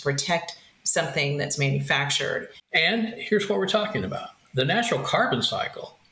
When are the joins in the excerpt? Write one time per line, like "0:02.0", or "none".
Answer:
0:02.5